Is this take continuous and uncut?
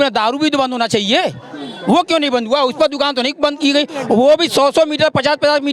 yes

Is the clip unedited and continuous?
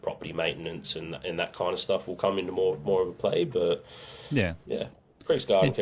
yes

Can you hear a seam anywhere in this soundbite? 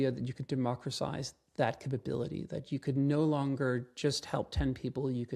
no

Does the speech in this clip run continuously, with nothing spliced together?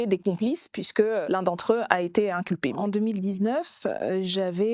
no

